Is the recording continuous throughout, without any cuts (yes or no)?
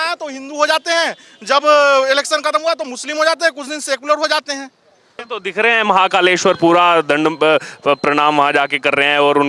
no